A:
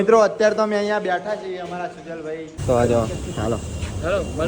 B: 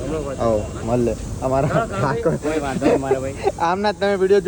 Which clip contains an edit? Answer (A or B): A